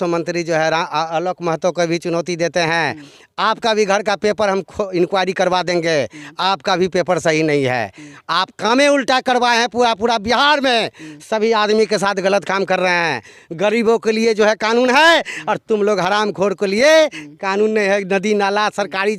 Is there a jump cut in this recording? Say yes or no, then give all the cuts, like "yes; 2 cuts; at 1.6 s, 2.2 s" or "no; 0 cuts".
no; 0 cuts